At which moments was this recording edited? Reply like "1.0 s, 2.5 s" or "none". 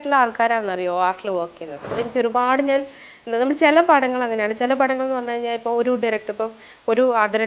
2.0 s